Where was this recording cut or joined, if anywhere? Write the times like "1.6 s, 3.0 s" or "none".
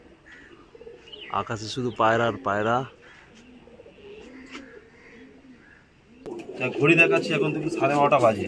6.4 s

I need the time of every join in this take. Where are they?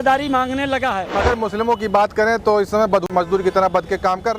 1.1 s, 3.1 s

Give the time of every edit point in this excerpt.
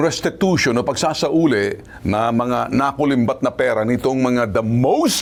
none

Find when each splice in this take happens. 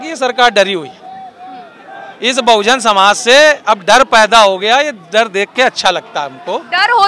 none

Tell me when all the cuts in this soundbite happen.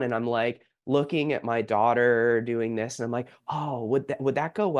none

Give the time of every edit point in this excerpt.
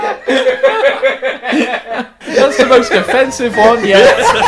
2.1 s

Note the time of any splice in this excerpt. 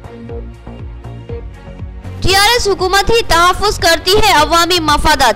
1.6 s

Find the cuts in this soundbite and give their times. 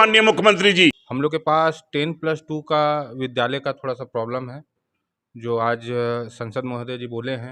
1.1 s

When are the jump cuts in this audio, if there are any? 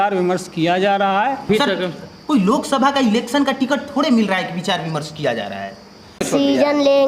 1.5 s, 6.2 s

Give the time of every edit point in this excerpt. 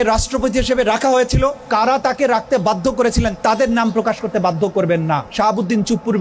1.6 s, 3.4 s, 5.3 s

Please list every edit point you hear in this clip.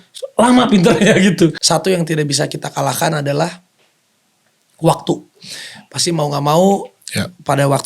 1.6 s

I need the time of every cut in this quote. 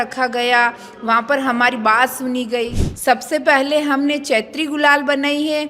2.8 s

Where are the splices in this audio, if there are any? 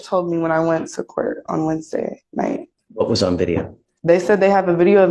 2.8 s

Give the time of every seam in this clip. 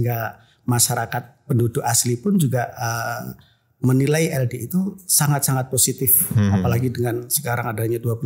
none

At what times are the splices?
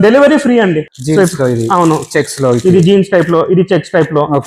0.9 s

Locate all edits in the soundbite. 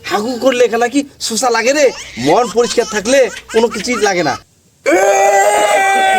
4.5 s

